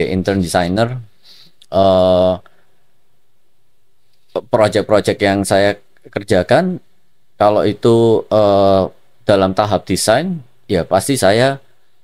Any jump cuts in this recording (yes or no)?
no